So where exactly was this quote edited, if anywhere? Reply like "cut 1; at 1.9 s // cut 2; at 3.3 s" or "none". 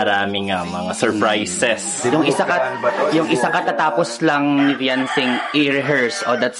cut 1; at 2.5 s